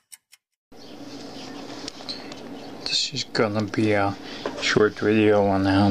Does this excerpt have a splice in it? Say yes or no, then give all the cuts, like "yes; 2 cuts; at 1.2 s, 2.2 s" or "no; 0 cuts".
no; 0 cuts